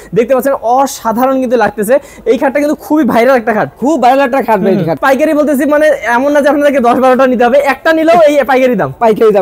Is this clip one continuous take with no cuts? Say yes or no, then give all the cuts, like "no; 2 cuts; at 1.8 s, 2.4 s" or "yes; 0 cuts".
no; 1 cut; at 5.0 s